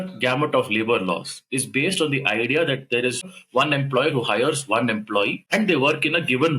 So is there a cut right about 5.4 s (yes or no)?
yes